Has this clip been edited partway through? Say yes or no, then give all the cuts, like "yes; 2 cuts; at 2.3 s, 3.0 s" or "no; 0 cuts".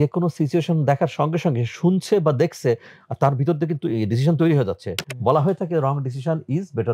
no; 0 cuts